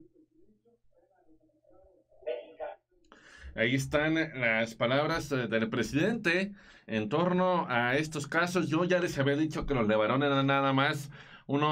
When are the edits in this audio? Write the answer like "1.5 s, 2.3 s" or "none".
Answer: none